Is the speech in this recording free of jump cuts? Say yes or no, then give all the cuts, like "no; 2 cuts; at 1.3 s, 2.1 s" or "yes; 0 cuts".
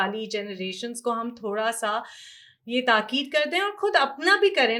yes; 0 cuts